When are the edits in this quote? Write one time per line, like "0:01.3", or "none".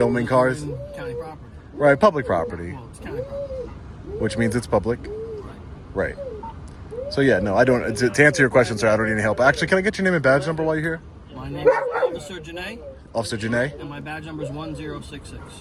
none